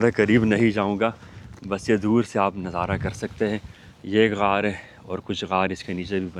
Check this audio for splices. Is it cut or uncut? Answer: uncut